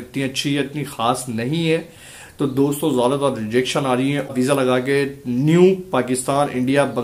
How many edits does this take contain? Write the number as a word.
one